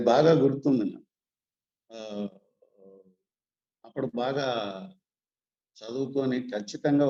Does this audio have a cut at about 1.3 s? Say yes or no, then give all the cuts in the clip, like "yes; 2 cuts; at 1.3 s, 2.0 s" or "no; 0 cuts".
no; 0 cuts